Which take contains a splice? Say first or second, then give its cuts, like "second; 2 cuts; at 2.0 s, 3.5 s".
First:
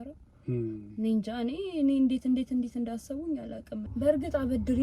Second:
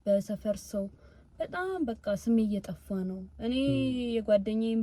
first; 1 cut; at 3.8 s